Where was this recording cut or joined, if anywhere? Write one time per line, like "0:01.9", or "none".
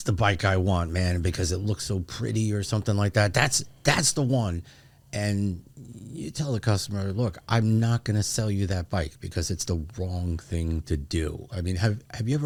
none

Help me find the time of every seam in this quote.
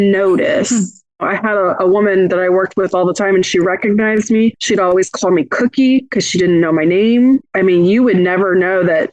0:01.1
0:04.6

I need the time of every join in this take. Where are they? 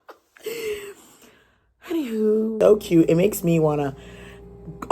0:02.5

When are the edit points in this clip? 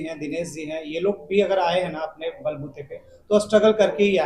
none

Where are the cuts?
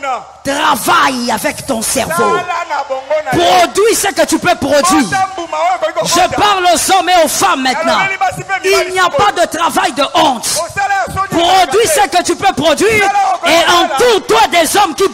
none

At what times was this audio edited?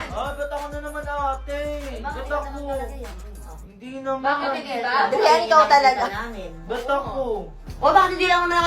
0:07.7

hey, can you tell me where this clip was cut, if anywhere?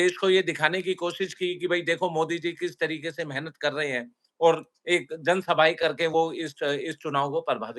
none

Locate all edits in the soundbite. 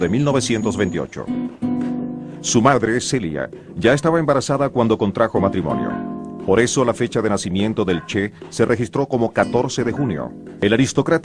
none

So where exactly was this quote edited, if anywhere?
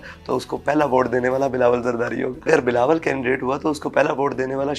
0:02.5

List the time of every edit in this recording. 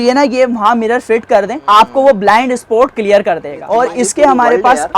0:01.6
0:03.5

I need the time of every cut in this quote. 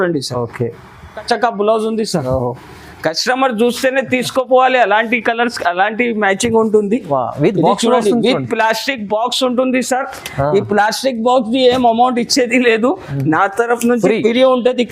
0:01.2

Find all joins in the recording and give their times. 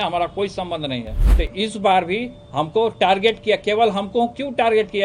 0:01.2

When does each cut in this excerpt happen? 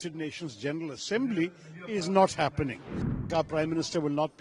0:03.3

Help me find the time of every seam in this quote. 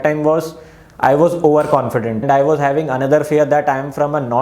0:02.2

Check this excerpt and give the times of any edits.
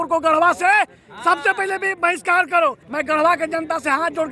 0:02.9

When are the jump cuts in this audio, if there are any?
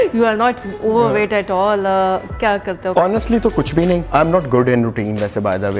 0:02.9
0:04.0

